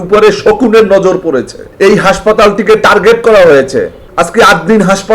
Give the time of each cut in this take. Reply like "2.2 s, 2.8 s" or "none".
1.6 s, 4.0 s